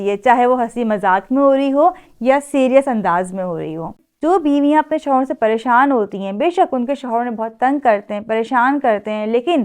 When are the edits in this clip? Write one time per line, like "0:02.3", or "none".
0:04.1